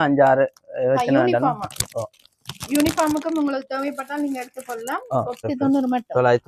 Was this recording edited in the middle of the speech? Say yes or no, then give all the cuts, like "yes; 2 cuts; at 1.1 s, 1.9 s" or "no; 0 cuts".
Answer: yes; 1 cut; at 5.4 s